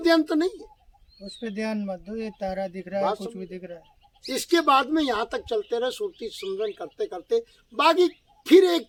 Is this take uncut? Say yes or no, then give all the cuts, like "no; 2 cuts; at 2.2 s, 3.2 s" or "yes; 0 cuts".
yes; 0 cuts